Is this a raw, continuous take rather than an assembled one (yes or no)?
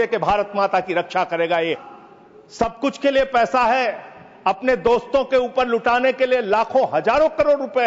no